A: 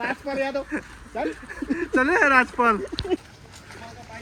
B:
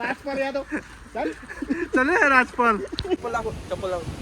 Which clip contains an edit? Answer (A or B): B